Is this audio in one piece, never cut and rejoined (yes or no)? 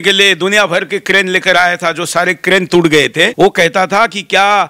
no